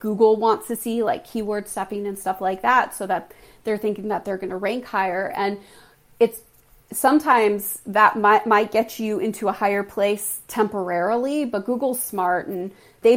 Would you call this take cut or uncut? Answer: uncut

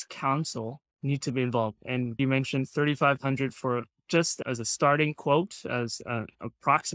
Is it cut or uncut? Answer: cut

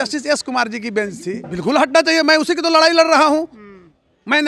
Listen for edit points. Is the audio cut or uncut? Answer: cut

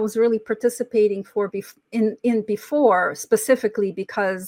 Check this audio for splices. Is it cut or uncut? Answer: uncut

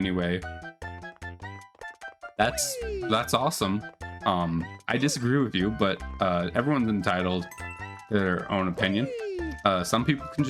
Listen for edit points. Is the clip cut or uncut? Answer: uncut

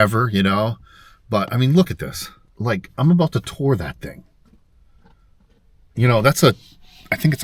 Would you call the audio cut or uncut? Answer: cut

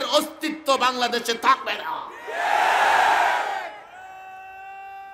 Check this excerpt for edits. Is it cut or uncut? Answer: uncut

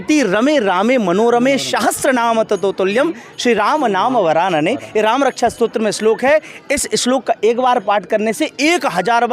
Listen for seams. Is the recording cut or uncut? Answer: uncut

